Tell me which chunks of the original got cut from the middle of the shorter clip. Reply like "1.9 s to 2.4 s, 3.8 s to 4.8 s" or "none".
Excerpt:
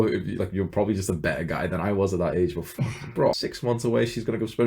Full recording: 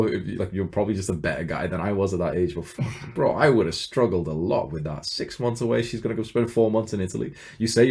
3.4 s to 5.1 s